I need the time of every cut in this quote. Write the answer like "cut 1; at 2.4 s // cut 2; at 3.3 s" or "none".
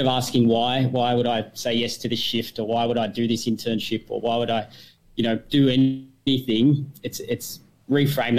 none

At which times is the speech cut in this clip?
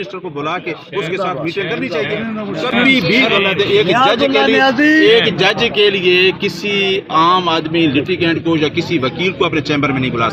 none

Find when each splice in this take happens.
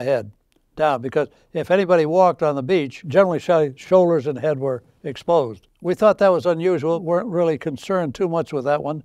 cut 1; at 3.0 s // cut 2; at 7.0 s

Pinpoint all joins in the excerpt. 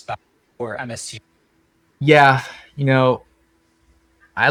none

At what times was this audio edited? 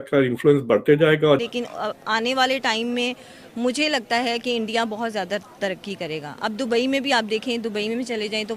cut 1; at 1.5 s

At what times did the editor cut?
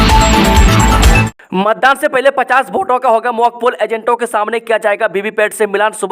cut 1; at 1.2 s

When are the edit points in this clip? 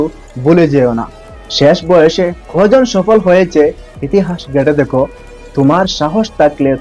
none

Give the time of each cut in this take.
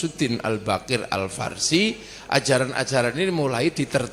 none

